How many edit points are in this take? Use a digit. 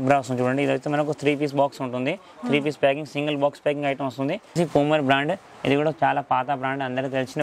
1